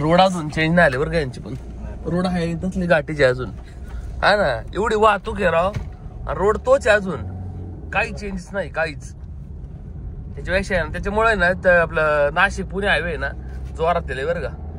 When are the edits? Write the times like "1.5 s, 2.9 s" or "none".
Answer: none